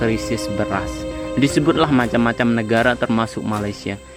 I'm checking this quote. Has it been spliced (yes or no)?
no